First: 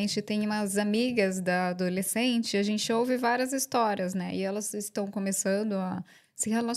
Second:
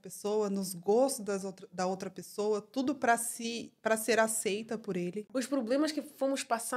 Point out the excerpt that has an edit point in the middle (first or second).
second